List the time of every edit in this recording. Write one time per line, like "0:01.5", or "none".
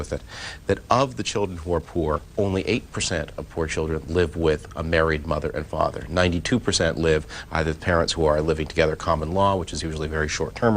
0:06.0